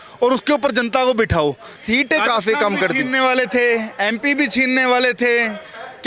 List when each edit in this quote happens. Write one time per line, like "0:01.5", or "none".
0:01.7